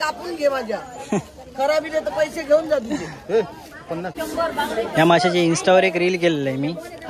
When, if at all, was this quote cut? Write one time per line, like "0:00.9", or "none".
0:04.2